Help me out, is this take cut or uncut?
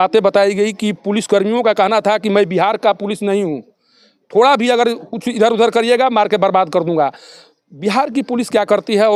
uncut